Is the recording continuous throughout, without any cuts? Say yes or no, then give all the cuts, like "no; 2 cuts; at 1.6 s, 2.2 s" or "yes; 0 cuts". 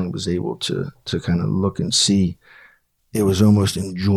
yes; 0 cuts